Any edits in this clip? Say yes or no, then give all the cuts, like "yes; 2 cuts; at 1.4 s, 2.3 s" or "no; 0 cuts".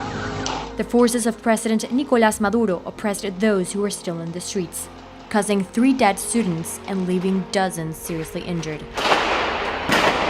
yes; 1 cut; at 5.4 s